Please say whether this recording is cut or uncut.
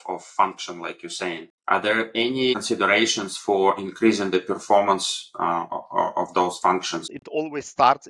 cut